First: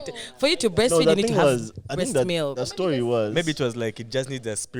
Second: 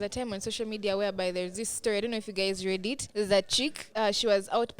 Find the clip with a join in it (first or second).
second